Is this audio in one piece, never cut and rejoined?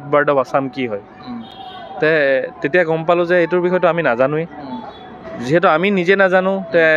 yes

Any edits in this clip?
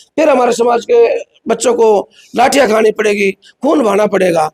no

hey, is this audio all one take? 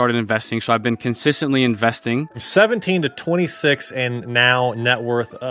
no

